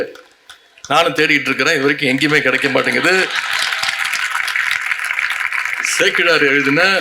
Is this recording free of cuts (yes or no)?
yes